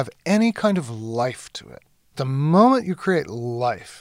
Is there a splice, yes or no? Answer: yes